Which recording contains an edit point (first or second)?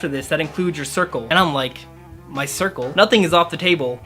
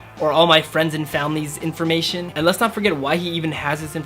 second